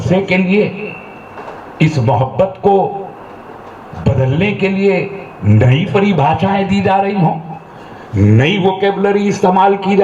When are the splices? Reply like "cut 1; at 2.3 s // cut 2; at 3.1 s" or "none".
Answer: none